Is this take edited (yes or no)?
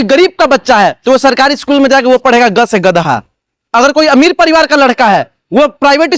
no